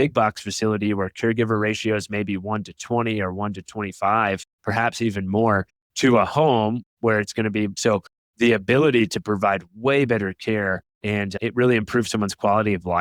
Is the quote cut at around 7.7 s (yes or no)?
yes